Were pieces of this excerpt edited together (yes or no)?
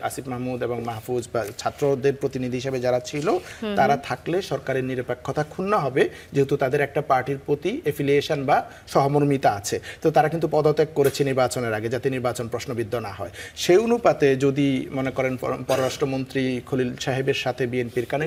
no